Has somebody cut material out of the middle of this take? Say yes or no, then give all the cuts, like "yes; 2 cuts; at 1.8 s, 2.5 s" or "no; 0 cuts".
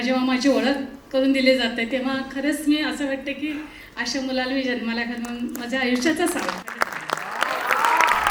no; 0 cuts